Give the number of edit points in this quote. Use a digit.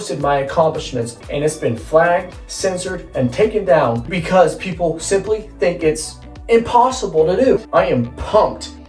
3